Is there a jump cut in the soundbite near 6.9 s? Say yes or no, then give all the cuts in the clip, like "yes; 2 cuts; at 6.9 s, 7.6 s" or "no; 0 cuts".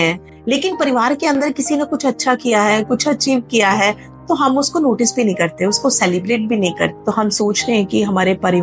yes; 1 cut; at 6.9 s